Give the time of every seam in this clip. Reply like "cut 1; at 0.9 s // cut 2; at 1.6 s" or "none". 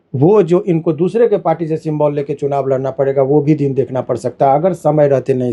none